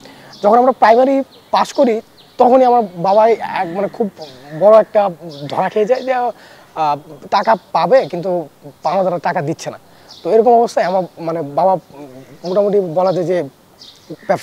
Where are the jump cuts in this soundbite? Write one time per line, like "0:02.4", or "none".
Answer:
none